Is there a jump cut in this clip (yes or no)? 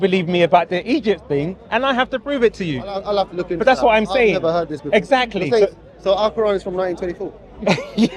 no